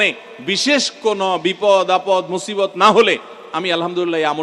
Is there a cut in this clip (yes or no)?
no